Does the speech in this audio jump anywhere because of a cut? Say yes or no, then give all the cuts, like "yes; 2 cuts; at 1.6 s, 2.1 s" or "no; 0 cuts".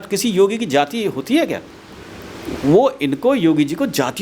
no; 0 cuts